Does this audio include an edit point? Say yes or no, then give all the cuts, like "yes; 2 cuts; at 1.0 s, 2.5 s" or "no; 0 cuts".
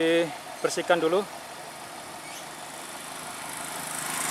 no; 0 cuts